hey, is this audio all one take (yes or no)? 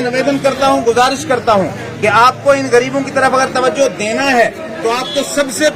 yes